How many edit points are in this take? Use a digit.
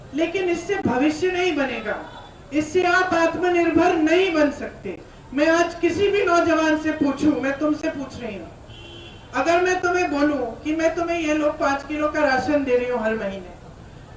0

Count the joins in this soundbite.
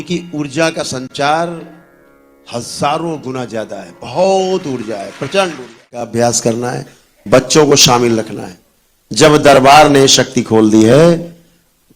1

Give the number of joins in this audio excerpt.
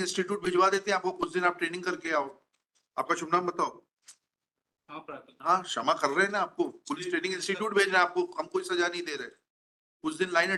0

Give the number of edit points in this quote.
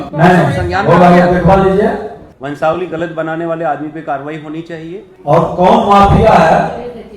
2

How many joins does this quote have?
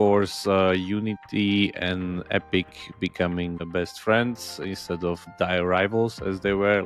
2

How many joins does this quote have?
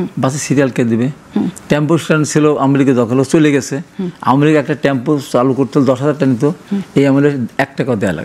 0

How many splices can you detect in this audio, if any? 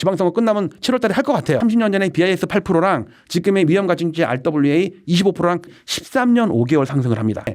2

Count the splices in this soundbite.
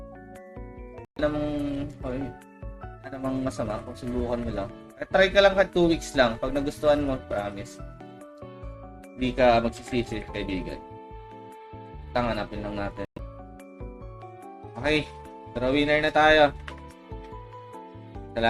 2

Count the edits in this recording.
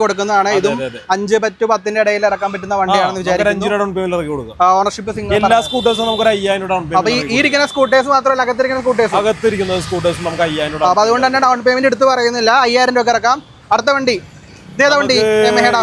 0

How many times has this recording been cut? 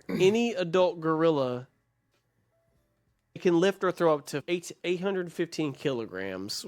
2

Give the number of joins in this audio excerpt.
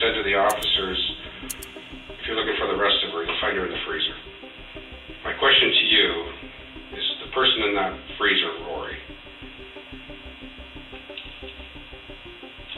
0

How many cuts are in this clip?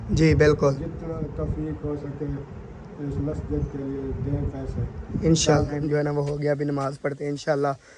2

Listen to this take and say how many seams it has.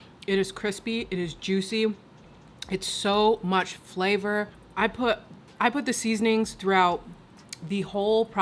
1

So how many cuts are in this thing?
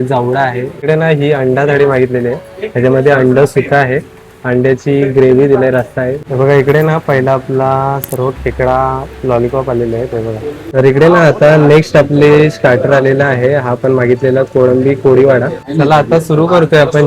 4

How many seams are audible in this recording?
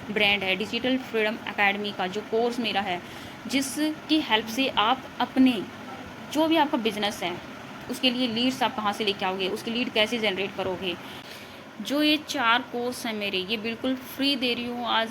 1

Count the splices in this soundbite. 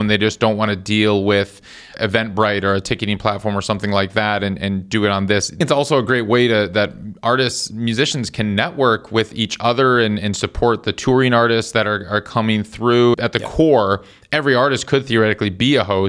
3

